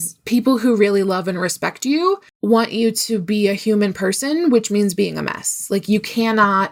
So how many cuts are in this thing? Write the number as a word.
zero